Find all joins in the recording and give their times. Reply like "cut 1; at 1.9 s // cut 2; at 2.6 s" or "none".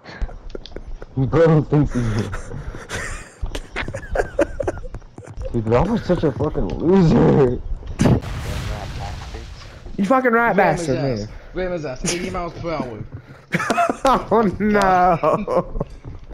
cut 1; at 8.2 s